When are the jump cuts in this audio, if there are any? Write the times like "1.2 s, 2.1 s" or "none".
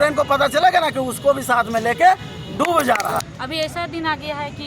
3.3 s